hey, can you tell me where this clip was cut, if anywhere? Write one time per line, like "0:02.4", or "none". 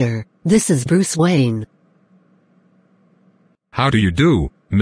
0:01.7
0:03.6